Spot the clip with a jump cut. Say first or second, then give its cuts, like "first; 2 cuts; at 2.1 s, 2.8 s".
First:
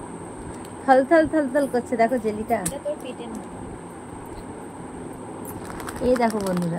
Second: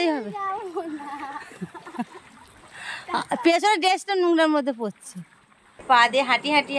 second; 1 cut; at 5.8 s